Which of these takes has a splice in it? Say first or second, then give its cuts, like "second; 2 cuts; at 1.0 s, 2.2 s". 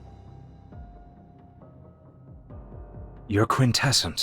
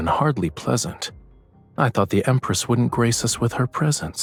first; 1 cut; at 3.2 s